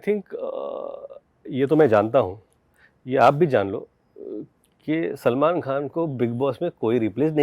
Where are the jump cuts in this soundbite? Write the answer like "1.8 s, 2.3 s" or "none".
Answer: none